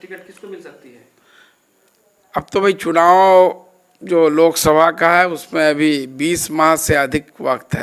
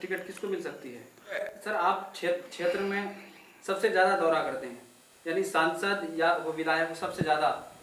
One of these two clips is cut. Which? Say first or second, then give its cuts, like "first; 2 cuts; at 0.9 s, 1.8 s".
second; 1 cut; at 1.6 s